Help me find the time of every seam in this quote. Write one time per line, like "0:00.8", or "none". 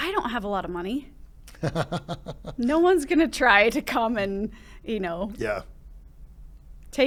none